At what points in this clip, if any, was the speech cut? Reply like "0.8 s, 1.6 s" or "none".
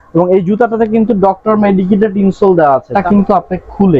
2.9 s